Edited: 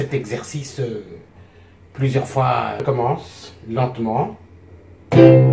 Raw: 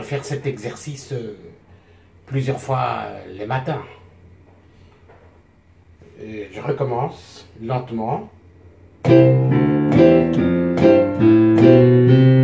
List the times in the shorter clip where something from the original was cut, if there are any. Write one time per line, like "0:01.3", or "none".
0:02.8